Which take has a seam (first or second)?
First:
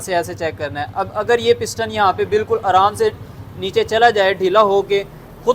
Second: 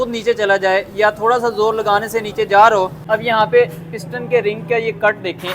second